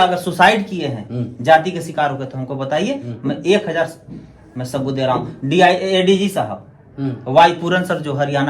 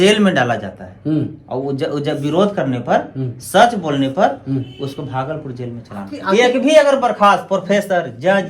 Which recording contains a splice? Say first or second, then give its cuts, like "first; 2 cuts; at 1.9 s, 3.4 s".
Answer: second; 1 cut; at 6.2 s